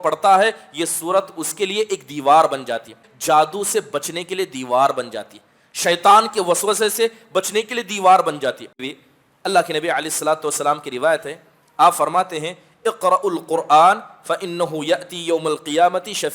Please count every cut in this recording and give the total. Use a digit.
2